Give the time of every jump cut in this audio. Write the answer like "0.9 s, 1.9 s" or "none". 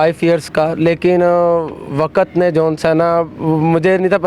none

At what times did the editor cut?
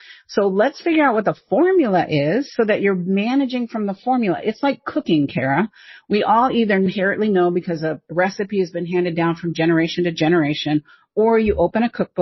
6.9 s

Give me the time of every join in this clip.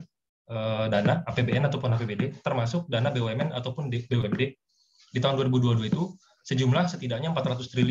none

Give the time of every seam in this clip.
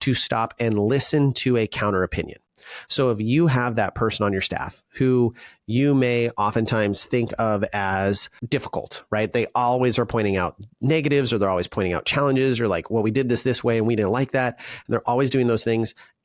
none

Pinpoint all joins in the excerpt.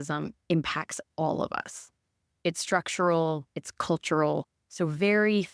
none

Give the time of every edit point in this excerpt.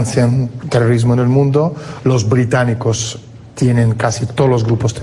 none

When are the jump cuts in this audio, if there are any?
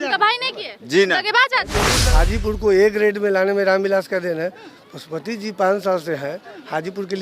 1.9 s

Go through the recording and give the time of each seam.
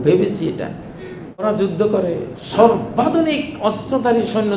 1.4 s

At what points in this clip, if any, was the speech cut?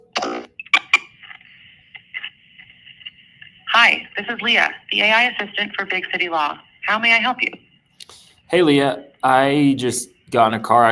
none

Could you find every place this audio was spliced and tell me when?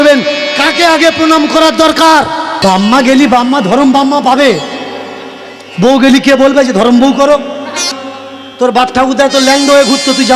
2.5 s, 7.9 s

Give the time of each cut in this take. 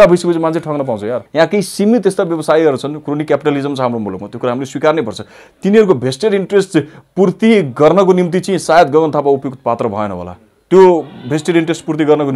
1.2 s

